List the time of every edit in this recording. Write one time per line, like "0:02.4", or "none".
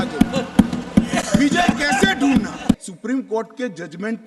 0:02.9